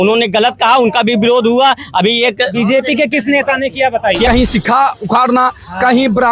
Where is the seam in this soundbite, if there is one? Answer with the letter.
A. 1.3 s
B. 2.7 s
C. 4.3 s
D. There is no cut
C